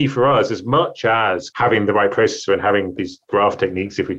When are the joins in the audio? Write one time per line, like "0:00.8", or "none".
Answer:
0:01.5
0:02.9